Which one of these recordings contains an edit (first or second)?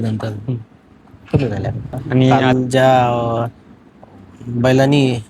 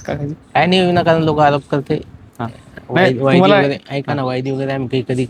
first